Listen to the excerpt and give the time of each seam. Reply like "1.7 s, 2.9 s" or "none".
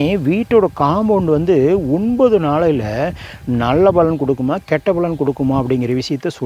none

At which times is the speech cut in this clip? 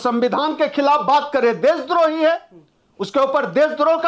none

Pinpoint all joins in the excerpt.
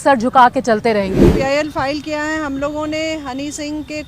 1.3 s

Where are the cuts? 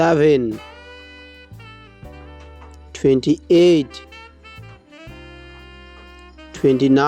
1.2 s, 3.0 s, 4.2 s, 6.1 s

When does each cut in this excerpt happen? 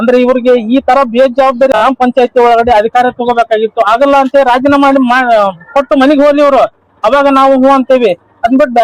1.7 s

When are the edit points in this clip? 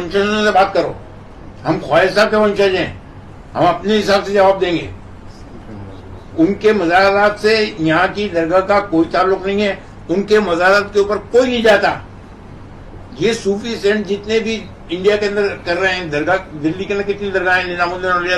none

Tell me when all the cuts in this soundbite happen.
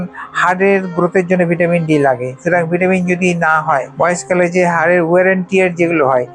3.9 s

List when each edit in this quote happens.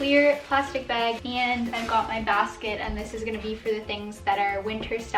1.2 s

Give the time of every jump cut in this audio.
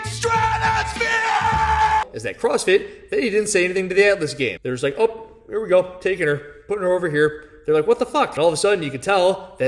2.1 s

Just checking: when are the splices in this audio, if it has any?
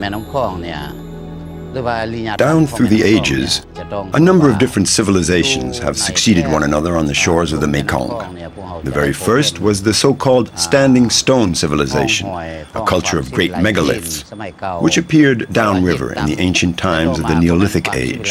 2.3 s

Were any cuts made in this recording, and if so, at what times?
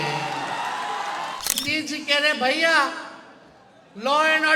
1.6 s

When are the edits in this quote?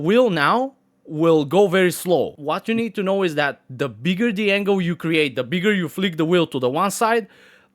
2.4 s

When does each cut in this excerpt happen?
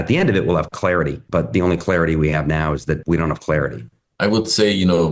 none

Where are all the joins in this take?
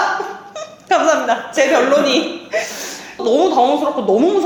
none

